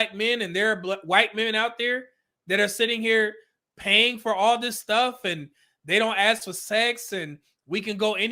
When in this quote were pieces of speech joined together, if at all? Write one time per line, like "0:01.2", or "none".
none